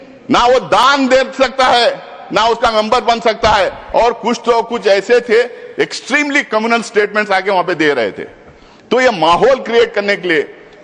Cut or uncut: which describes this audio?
cut